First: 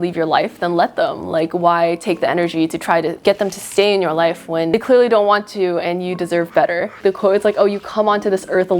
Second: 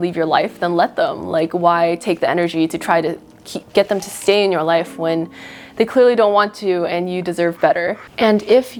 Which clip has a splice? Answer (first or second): first